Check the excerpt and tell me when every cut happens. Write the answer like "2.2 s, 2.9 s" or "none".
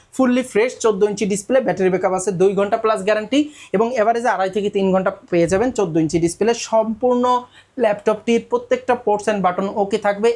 none